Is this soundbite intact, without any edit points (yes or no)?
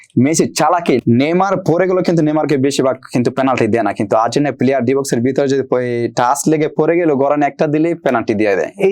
no